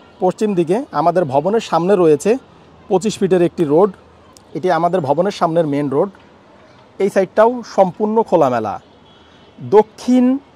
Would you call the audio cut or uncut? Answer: uncut